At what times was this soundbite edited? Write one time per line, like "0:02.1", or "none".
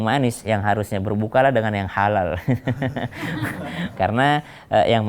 0:03.9